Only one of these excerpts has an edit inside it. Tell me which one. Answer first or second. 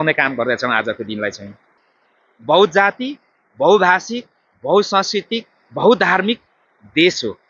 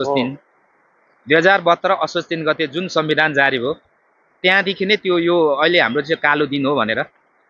first